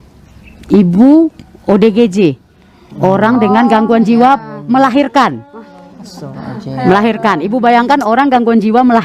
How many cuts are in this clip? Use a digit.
0